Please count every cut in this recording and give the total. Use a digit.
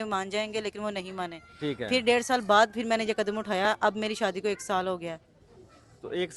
0